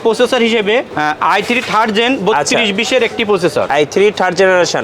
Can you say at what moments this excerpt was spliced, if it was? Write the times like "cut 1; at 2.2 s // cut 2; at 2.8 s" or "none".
cut 1; at 0.9 s // cut 2; at 3.7 s